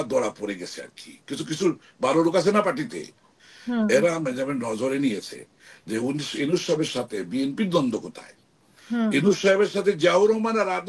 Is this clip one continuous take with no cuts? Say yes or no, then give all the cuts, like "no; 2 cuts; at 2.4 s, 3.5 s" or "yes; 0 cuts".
yes; 0 cuts